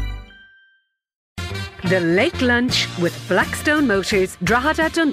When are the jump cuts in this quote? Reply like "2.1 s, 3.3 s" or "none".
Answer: 1.3 s